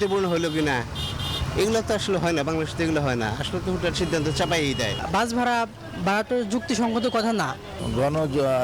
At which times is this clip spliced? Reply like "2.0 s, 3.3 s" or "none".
4.9 s